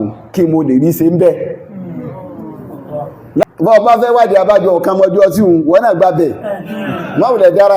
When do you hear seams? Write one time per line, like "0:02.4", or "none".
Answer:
0:03.4

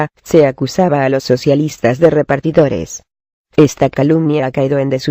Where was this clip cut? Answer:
0:02.1

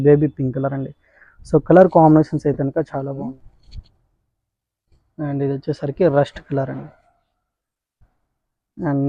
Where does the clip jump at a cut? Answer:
0:03.1

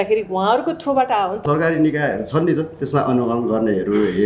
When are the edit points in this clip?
0:01.4

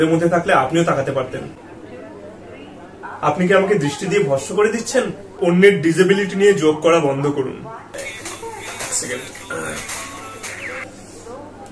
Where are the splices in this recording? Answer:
0:01.6
0:05.2

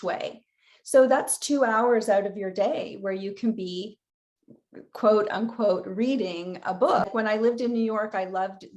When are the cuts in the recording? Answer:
0:07.1

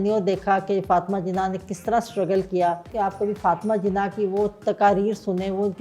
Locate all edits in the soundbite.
0:02.9

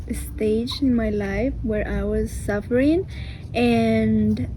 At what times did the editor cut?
none

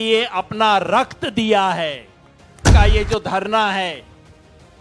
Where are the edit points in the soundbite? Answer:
0:02.6

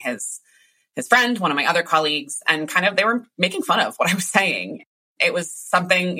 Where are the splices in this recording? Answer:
0:04.8

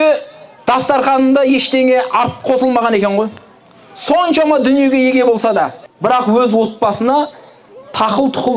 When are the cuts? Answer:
0:05.8

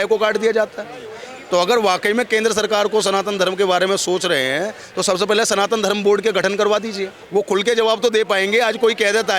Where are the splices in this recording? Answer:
0:07.1

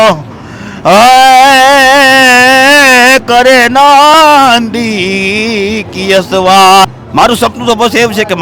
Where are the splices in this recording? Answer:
0:06.9

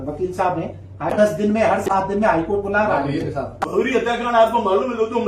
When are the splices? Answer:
0:01.1
0:03.6

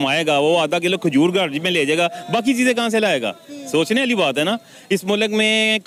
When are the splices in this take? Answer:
none

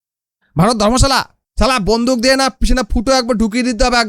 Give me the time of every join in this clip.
0:01.4

